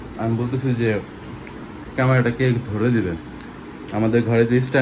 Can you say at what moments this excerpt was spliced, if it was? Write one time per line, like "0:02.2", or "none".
none